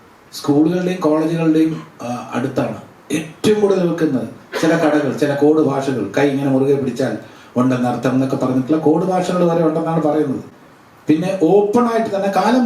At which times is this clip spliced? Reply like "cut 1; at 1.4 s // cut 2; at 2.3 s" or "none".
none